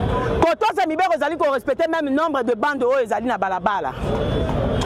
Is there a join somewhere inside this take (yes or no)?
no